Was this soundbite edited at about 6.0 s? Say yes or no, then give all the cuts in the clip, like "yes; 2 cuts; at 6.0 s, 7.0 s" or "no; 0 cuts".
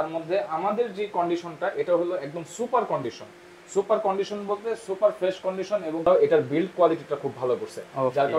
yes; 1 cut; at 6.0 s